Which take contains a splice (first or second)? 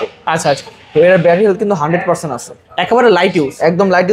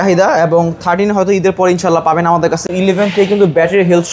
second